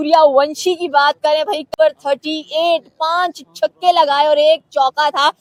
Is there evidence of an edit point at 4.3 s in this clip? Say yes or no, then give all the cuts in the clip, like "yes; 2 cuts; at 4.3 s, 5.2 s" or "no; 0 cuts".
no; 0 cuts